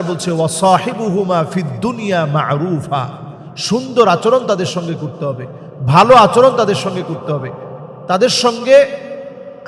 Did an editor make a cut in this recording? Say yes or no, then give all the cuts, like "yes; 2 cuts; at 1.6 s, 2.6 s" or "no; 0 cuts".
no; 0 cuts